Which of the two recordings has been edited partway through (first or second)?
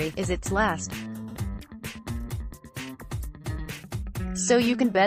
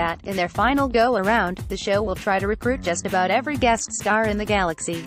first